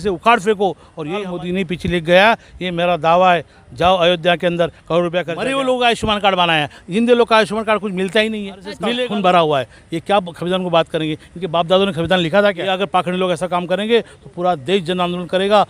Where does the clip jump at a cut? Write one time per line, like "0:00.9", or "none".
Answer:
0:01.3
0:05.4
0:08.8
0:12.7

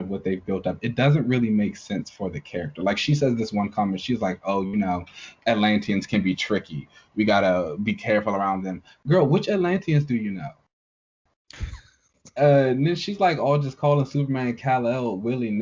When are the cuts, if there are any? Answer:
0:12.2

